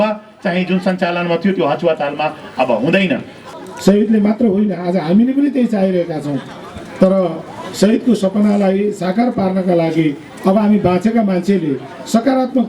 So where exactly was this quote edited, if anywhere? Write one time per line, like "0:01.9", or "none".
0:03.4